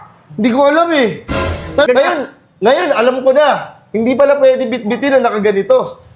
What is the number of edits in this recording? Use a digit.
1